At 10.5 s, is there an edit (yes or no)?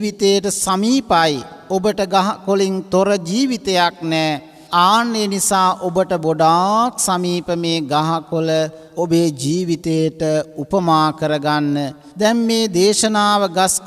no